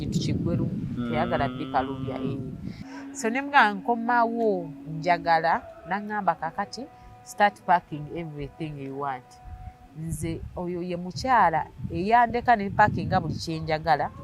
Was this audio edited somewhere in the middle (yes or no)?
yes